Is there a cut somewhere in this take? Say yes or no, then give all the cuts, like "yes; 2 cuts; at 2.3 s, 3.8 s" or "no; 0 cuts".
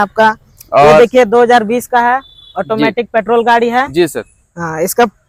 no; 0 cuts